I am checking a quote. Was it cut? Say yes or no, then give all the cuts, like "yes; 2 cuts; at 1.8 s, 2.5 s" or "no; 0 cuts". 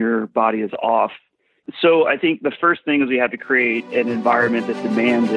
no; 0 cuts